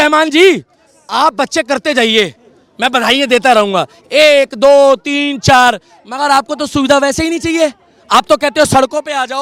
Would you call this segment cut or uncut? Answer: uncut